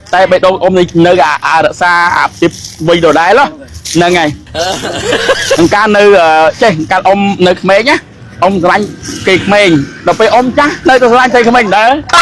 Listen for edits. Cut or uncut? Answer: uncut